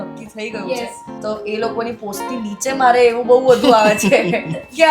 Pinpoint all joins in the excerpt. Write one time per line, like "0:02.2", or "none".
0:01.1